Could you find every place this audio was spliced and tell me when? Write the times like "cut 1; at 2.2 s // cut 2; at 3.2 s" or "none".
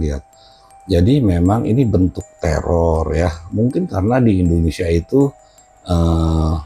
none